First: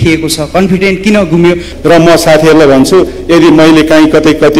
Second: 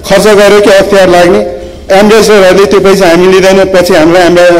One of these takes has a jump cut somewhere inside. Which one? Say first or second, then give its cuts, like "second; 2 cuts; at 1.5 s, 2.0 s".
first; 1 cut; at 1.7 s